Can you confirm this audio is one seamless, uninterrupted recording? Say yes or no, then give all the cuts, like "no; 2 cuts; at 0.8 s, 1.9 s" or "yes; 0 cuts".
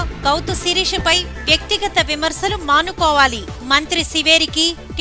yes; 0 cuts